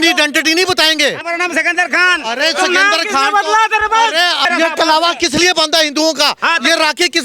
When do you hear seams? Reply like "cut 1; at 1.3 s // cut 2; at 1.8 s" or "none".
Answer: cut 1; at 1.2 s // cut 2; at 4.4 s